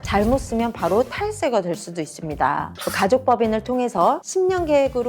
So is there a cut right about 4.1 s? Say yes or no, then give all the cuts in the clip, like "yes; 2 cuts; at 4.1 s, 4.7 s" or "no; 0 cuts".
no; 1 cut; at 2.8 s